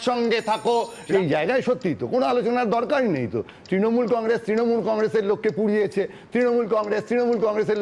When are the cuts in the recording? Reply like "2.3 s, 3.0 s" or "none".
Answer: 1.0 s